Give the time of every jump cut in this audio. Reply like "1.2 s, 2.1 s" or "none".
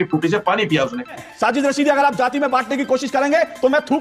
1.3 s